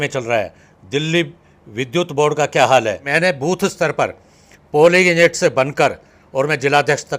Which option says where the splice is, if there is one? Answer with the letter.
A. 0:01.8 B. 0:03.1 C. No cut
B